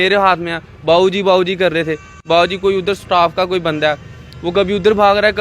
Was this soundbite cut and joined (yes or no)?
no